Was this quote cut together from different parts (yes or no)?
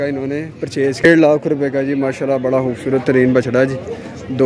yes